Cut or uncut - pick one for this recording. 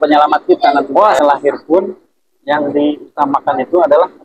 cut